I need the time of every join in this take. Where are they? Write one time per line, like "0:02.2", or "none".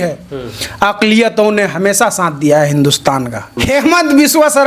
0:03.5